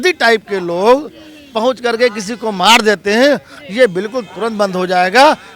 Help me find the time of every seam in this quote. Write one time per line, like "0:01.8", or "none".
none

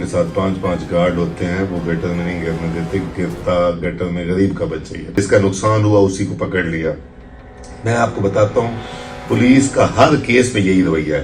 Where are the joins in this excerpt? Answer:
0:05.1

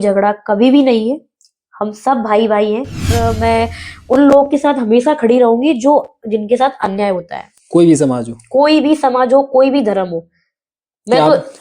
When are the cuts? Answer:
0:03.1

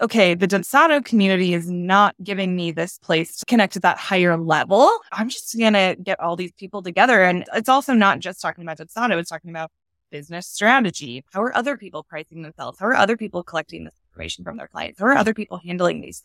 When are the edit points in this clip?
0:03.3
0:07.5
0:11.1

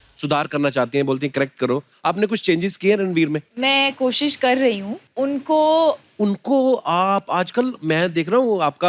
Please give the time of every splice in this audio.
0:03.5
0:05.0
0:06.1

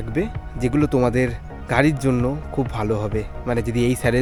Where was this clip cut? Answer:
none

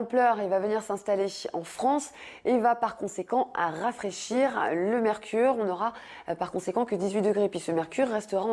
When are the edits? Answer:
0:03.2

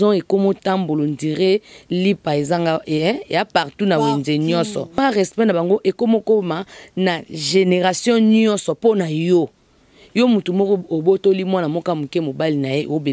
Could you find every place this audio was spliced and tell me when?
0:05.0

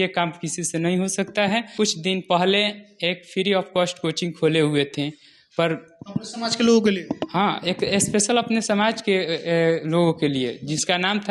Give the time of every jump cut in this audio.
0:01.7

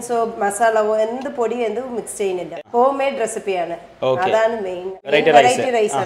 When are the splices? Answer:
0:02.5
0:05.1

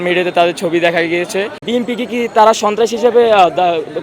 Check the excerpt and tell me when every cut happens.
0:01.6

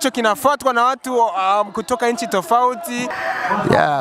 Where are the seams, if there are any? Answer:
0:03.1

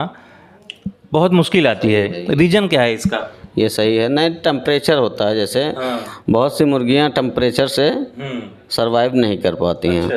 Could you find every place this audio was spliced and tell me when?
none

